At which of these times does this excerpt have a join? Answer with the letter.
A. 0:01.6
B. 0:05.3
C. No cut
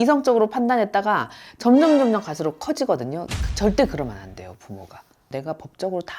B